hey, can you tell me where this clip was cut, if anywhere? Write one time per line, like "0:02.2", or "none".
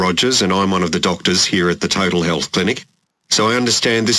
none